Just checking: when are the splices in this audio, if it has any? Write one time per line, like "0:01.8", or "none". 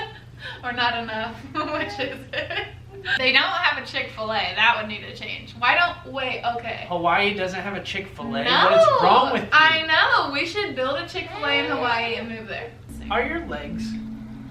0:03.1
0:12.9